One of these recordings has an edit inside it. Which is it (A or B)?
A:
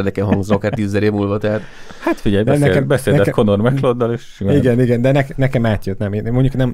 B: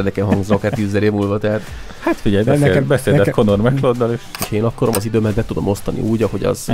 B